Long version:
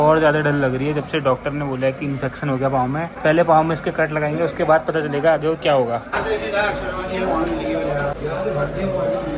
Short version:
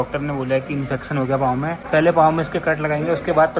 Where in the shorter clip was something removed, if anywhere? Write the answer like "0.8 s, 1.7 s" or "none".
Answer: none